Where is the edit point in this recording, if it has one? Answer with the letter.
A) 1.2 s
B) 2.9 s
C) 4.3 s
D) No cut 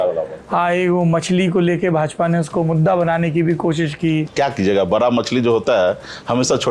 C